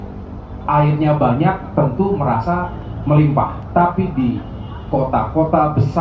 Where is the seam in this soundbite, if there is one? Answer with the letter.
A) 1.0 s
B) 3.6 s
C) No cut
B